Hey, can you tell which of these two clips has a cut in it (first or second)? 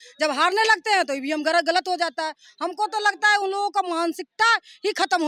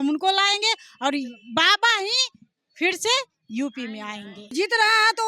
second